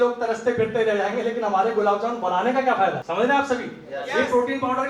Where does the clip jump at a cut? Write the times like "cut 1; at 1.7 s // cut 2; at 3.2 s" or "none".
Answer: cut 1; at 3.0 s